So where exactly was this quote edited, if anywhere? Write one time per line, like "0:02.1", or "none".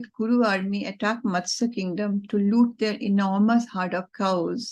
none

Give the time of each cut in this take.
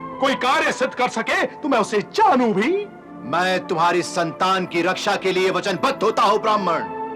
none

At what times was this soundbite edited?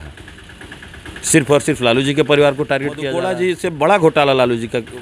0:03.3

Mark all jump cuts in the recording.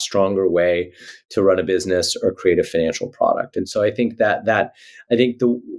none

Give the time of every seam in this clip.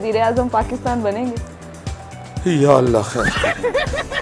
0:03.3

